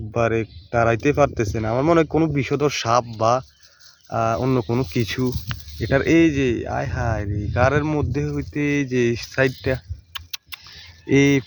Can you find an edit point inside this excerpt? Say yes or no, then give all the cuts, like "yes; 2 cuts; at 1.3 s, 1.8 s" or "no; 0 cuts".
no; 0 cuts